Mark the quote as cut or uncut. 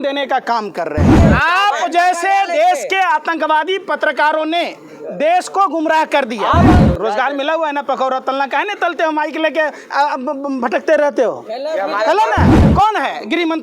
cut